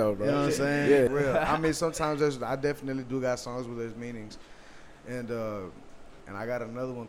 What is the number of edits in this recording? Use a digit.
2